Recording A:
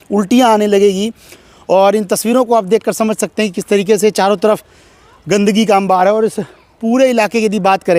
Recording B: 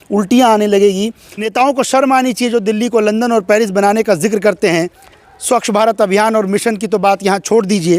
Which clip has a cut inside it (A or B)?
B